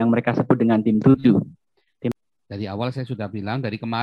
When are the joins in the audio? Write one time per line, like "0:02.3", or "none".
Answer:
0:02.1